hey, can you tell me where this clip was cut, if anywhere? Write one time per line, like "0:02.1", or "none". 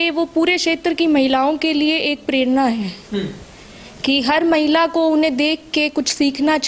none